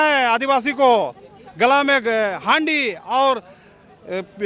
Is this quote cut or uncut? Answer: uncut